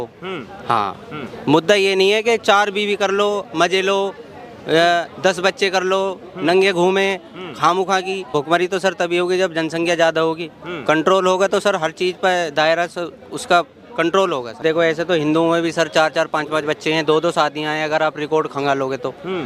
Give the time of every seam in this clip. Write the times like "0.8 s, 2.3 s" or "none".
8.3 s, 14.5 s